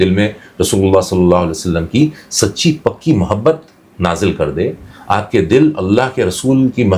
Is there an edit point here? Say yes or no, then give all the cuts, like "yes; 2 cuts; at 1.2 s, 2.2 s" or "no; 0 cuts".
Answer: no; 0 cuts